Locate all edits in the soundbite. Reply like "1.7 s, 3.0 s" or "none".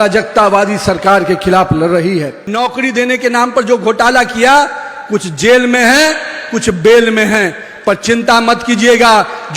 2.4 s